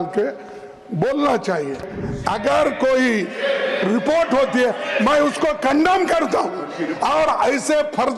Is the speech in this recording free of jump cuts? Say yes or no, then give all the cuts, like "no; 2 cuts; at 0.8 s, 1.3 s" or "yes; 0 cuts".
no; 1 cut; at 2.0 s